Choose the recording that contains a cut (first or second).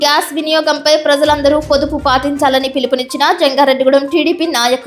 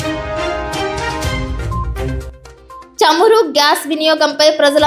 second